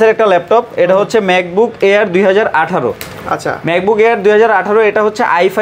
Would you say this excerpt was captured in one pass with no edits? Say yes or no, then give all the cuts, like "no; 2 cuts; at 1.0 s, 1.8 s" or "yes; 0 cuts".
yes; 0 cuts